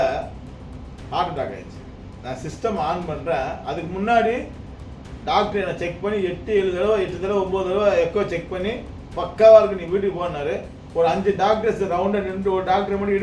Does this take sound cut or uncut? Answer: cut